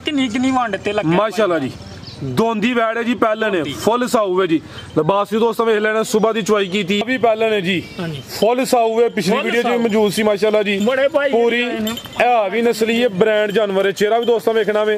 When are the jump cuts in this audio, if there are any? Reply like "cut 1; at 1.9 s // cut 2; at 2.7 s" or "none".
cut 1; at 7.0 s